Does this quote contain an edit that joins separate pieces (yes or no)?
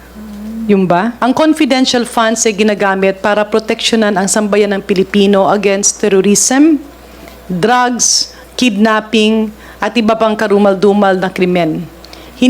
yes